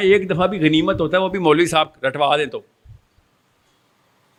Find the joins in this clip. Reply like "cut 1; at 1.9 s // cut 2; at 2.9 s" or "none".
none